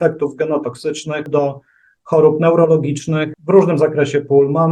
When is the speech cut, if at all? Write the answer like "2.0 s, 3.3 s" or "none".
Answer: 1.3 s, 3.3 s

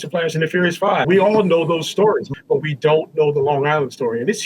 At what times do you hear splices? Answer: 1.1 s, 2.3 s

